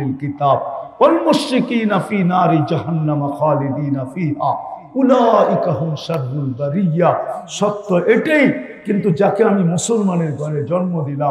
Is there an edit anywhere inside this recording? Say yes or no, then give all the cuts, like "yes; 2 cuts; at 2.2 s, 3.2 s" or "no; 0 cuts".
no; 0 cuts